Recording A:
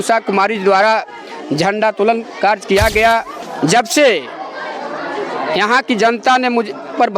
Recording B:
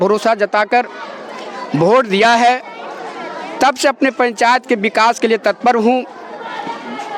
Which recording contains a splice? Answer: A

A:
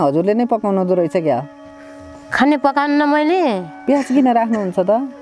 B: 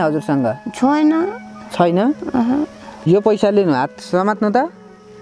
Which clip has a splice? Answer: B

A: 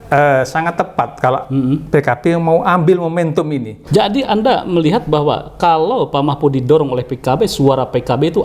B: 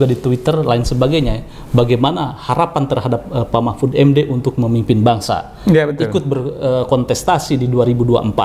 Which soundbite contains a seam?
A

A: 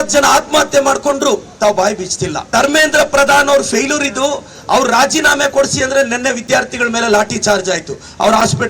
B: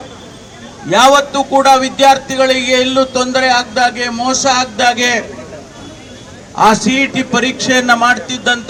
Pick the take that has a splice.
A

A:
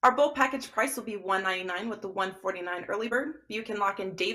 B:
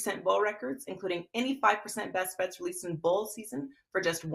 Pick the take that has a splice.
A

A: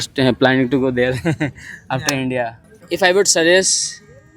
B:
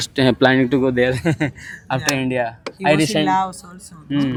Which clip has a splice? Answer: A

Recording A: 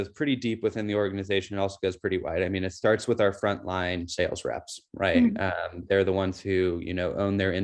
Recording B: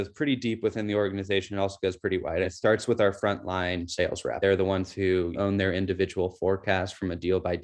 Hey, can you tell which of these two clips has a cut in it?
B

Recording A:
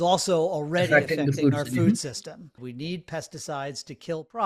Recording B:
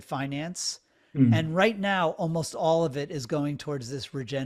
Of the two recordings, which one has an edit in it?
A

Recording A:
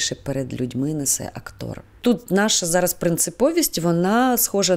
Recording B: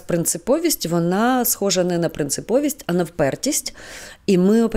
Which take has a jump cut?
A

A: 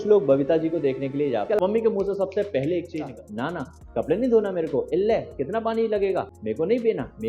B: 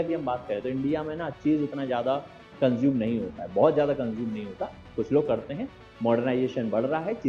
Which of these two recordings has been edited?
A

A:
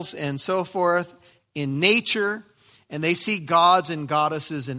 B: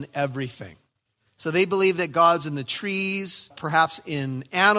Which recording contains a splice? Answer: B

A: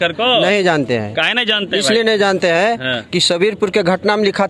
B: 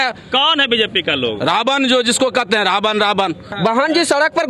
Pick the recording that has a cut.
B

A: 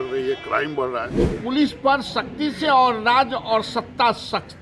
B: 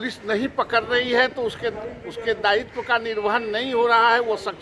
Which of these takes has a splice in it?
A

